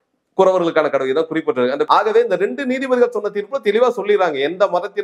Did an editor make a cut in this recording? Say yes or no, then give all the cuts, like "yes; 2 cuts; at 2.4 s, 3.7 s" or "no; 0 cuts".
yes; 1 cut; at 1.9 s